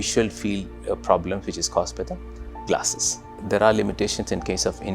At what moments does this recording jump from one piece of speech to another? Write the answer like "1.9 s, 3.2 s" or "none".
3.4 s